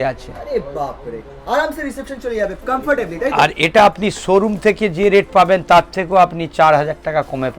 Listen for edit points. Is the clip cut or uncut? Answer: uncut